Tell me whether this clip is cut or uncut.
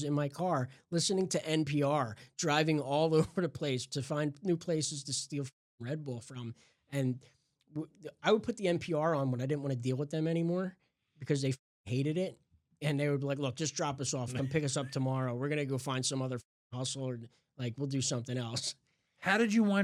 uncut